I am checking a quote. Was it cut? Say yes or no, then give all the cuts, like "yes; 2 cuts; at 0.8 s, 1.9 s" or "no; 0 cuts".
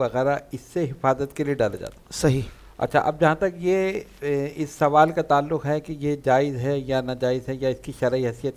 no; 0 cuts